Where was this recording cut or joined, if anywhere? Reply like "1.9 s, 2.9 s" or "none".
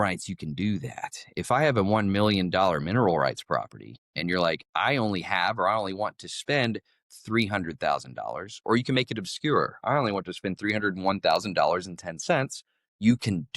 8.5 s